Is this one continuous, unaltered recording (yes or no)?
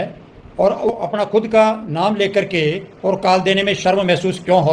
no